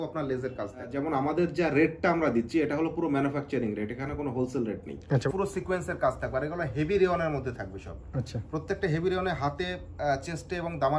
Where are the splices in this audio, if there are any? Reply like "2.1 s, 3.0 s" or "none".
0.9 s, 5.2 s